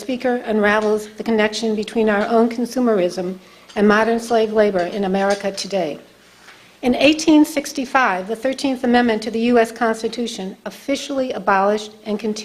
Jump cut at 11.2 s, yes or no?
yes